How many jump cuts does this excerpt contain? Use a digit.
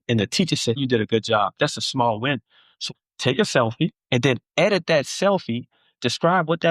2